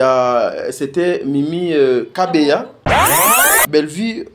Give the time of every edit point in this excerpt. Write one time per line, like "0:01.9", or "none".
0:03.2